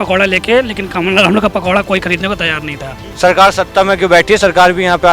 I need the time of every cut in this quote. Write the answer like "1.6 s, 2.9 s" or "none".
3.0 s